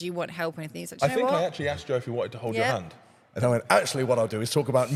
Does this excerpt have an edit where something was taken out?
no; 0 cuts

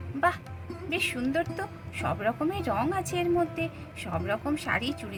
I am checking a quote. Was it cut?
no; 0 cuts

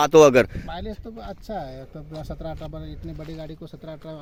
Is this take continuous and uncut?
yes; 0 cuts

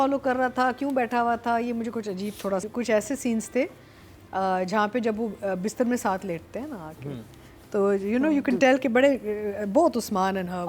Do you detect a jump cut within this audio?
yes; 1 cut; at 2.6 s

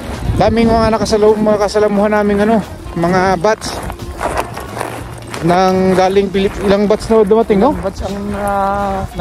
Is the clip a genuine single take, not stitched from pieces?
yes; 0 cuts

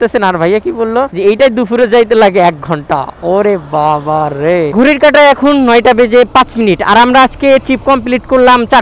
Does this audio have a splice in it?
yes; 1 cut; at 4.7 s

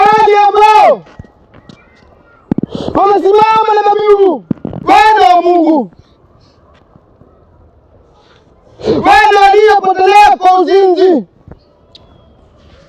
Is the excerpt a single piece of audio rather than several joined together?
no; 1 cut; at 4.8 s

